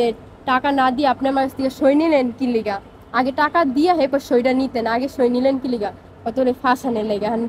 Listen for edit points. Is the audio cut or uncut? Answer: uncut